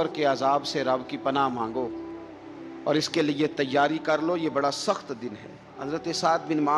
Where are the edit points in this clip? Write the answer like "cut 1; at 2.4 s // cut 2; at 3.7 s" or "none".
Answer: cut 1; at 5.7 s